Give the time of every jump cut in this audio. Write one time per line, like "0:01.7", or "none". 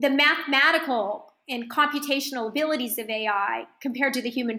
none